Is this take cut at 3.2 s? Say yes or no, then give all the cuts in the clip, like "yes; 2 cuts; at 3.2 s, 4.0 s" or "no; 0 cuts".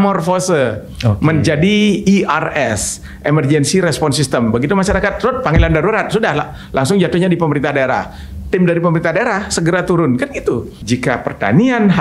no; 1 cut; at 10.7 s